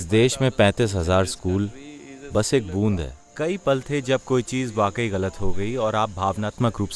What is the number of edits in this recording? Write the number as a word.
one